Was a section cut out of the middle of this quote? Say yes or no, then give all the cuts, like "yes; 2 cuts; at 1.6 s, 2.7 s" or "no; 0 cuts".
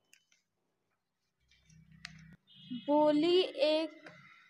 yes; 1 cut; at 2.3 s